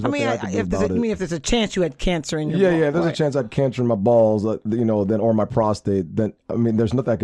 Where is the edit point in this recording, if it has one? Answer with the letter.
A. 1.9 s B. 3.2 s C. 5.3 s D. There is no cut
D